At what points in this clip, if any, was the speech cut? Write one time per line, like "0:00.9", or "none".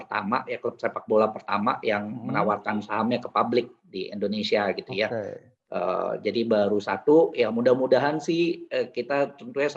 none